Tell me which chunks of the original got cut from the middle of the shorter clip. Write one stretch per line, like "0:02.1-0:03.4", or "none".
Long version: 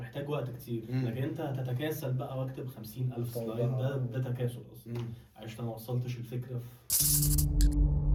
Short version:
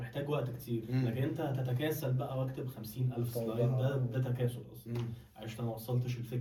none